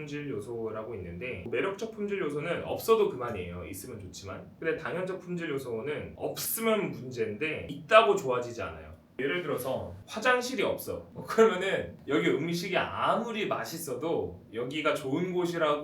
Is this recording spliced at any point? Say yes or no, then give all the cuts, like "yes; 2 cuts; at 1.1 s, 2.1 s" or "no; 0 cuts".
yes; 8 cuts; at 1.4 s, 4.5 s, 6.1 s, 7.7 s, 9.2 s, 10.0 s, 11.1 s, 11.9 s